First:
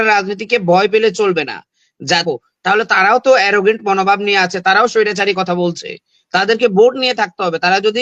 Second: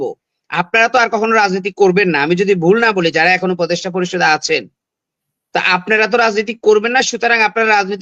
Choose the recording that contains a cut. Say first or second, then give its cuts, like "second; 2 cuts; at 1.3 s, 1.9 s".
first; 1 cut; at 2.2 s